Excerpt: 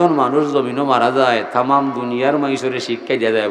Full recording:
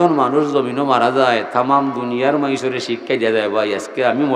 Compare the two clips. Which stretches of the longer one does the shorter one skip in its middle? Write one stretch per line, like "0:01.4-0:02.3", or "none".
none